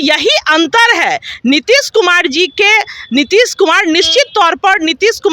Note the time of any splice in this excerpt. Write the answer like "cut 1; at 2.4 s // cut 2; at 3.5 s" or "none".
none